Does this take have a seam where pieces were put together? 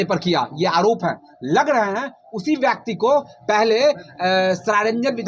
no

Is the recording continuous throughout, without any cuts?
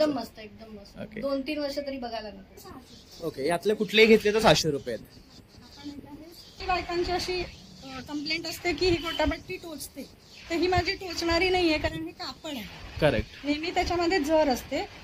no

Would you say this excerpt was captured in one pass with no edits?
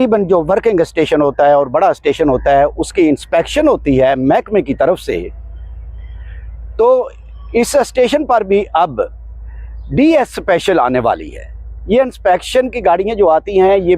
yes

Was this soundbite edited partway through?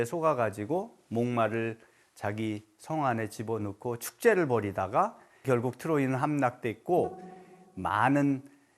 yes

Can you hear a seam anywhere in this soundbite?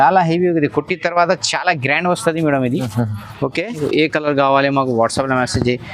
yes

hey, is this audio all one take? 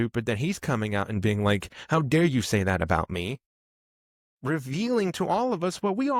yes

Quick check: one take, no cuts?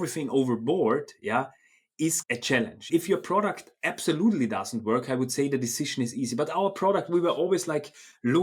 no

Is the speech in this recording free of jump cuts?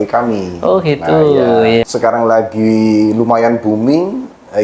no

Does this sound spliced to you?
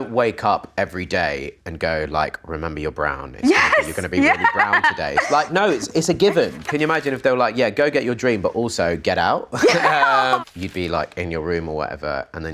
yes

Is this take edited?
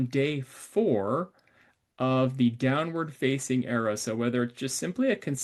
no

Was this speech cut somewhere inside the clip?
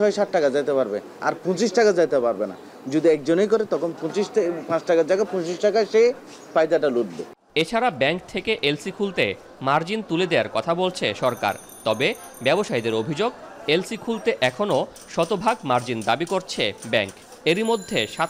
no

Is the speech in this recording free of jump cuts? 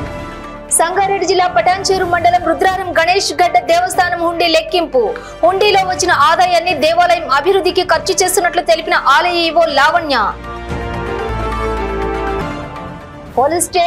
yes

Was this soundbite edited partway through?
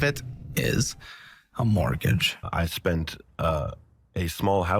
yes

